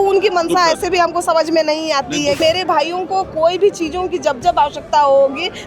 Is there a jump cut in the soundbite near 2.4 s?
yes; 1 cut; at 2.4 s

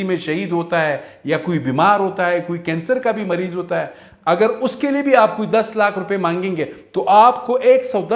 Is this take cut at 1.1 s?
no; 0 cuts

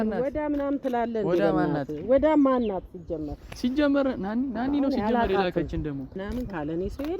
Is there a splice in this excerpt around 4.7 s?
no; 1 cut; at 6.1 s

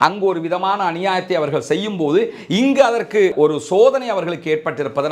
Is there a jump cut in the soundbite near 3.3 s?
yes; 1 cut; at 3.3 s

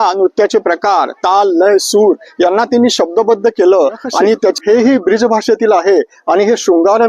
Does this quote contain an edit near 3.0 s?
no; 1 cut; at 4.6 s

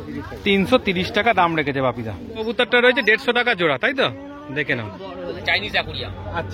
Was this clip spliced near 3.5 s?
no; 2 cuts; at 2.2 s, 5.4 s

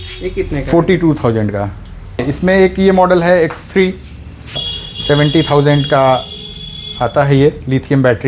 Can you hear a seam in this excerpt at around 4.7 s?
yes; 2 cuts; at 2.2 s, 4.7 s

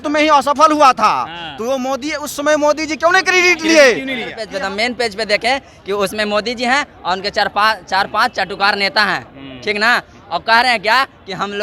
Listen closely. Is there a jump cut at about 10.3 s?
no; 1 cut; at 4.4 s

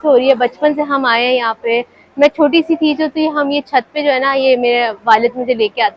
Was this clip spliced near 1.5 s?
no; 0 cuts

